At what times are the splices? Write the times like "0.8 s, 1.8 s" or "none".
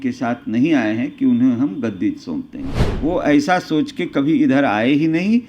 2.8 s